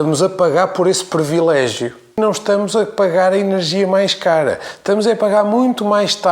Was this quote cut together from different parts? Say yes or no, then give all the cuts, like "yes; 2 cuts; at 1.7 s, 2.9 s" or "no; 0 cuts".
yes; 1 cut; at 2.1 s